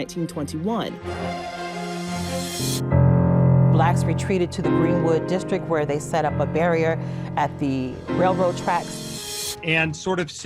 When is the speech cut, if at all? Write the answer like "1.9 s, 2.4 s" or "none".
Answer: 2.7 s, 9.3 s